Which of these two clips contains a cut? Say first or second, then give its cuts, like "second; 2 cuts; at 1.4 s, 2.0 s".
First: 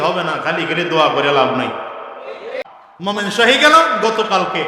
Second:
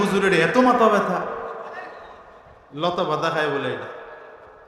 first; 1 cut; at 2.9 s